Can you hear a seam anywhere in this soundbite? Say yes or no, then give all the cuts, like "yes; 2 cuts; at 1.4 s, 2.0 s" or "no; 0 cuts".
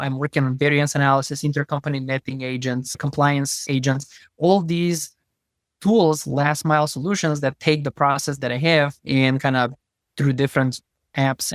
no; 0 cuts